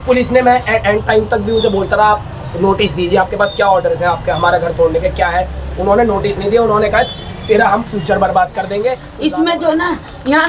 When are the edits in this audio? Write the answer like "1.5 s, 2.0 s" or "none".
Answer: 9.1 s